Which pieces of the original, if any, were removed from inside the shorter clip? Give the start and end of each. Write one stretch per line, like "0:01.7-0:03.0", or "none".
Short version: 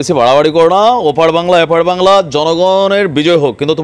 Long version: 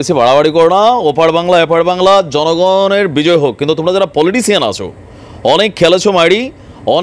none